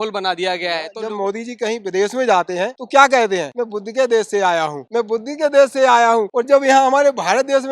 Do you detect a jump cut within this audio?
yes; 5 cuts; at 0.9 s, 2.8 s, 3.5 s, 4.8 s, 6.3 s

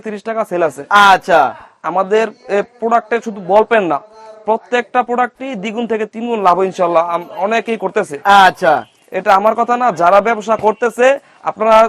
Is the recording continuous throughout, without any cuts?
yes; 0 cuts

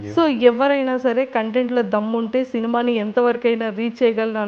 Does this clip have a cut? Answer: no; 0 cuts

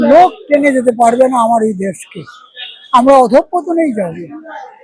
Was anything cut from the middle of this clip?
no; 0 cuts

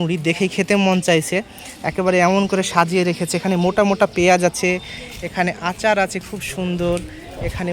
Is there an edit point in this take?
no; 0 cuts

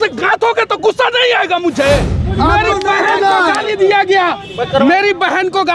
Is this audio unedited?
no; 1 cut; at 2.3 s

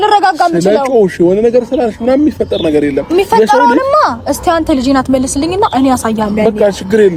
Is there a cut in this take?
no; 0 cuts

